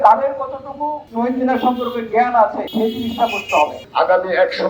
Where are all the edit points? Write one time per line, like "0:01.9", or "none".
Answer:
0:01.0
0:02.6
0:03.8